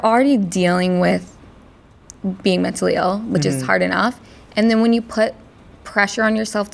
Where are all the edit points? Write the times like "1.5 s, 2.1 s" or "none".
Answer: none